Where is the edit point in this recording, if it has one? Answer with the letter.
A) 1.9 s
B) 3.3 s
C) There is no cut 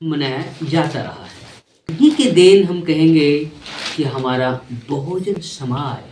A